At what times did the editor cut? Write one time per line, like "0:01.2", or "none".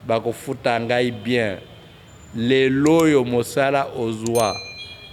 none